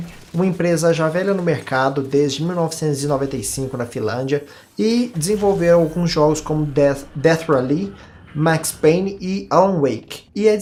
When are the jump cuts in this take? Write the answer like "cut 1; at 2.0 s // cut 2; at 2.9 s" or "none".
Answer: none